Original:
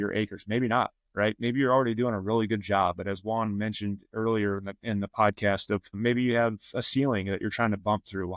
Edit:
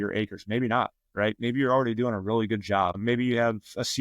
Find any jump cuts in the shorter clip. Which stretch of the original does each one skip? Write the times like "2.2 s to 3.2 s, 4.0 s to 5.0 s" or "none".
3.0 s to 5.9 s